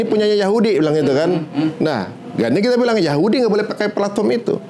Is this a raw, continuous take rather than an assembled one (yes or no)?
yes